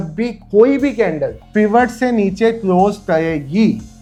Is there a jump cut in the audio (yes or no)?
no